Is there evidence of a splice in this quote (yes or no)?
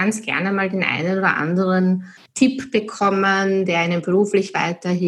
yes